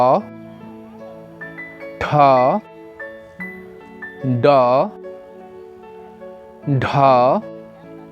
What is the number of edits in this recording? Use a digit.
0